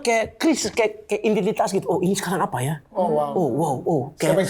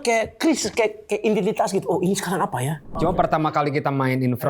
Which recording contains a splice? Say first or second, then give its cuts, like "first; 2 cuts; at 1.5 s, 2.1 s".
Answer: second; 1 cut; at 2.8 s